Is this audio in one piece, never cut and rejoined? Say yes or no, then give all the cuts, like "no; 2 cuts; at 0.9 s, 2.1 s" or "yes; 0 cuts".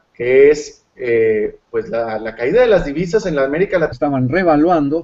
yes; 0 cuts